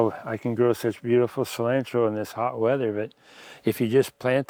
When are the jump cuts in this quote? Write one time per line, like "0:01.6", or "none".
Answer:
none

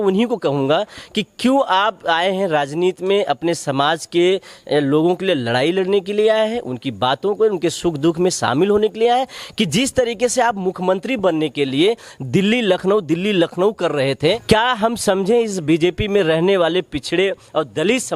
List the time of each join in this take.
0:14.4

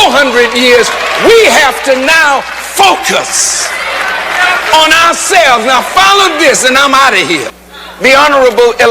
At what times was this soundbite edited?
0:07.5

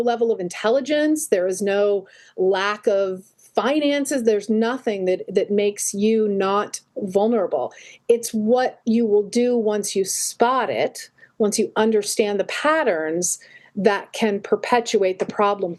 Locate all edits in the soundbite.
none

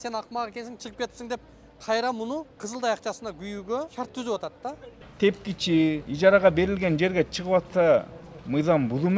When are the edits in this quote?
0:02.6
0:03.9
0:05.0
0:06.1

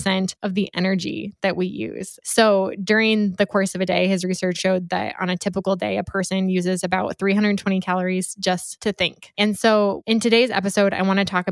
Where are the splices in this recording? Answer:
0:02.1
0:04.6
0:09.0
0:10.0

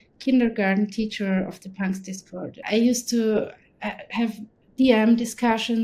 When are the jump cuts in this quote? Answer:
0:02.6

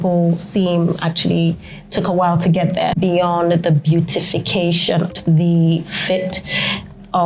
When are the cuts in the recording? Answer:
0:03.0
0:05.1

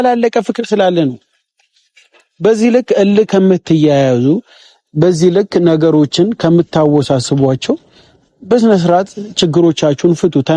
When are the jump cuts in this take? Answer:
none

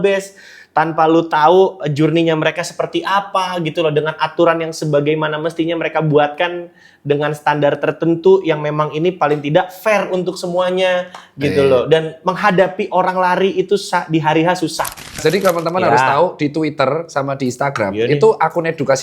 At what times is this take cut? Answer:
0:15.2

